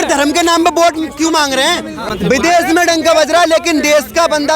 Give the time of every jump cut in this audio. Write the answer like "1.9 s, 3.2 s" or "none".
2.0 s